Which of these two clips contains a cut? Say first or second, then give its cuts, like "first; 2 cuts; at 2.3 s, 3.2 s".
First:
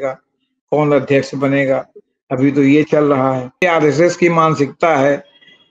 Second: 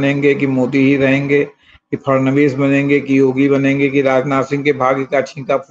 first; 1 cut; at 3.6 s